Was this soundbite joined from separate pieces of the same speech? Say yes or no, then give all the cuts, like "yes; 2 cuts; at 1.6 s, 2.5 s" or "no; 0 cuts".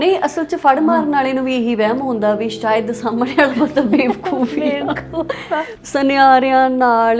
yes; 1 cut; at 5.7 s